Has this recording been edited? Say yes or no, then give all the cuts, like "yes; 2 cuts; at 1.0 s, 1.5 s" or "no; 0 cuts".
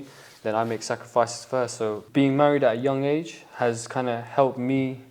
yes; 1 cut; at 2.0 s